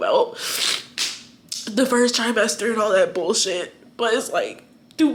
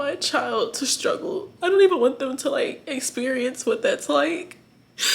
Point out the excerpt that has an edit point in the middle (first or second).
second